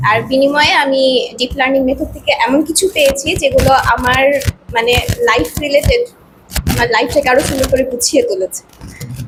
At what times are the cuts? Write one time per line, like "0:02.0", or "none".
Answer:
none